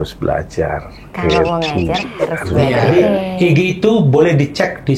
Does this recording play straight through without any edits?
no; 1 cut; at 2.9 s

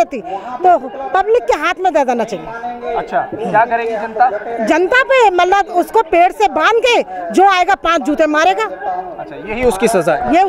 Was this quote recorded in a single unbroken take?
yes; 0 cuts

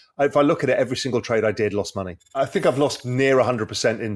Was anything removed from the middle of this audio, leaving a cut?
yes; 1 cut; at 2.2 s

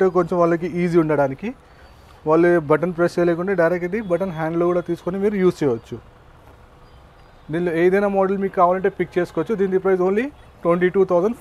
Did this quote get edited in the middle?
no; 0 cuts

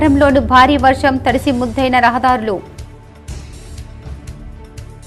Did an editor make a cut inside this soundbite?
no; 0 cuts

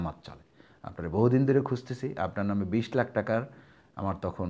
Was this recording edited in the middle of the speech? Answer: no; 0 cuts

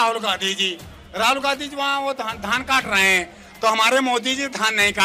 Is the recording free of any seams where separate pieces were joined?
yes; 0 cuts

